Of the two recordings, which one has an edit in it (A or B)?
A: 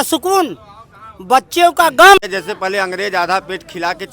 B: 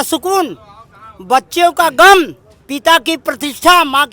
A